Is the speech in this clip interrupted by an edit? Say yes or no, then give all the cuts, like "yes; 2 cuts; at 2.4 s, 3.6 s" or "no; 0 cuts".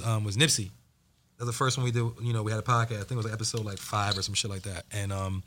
no; 0 cuts